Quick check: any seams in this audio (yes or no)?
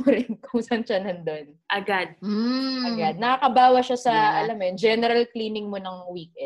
no